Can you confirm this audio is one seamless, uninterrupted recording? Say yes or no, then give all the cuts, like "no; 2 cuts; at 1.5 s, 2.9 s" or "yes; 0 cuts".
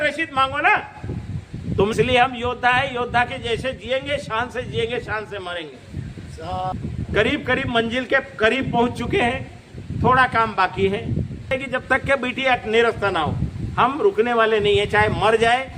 no; 3 cuts; at 1.9 s, 6.7 s, 11.5 s